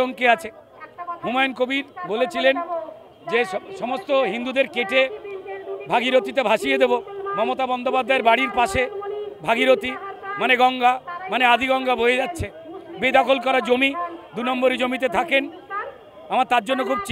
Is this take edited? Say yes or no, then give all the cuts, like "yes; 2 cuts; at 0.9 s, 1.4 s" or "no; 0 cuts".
no; 0 cuts